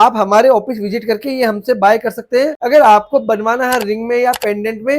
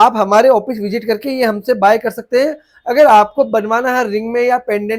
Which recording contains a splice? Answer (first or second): first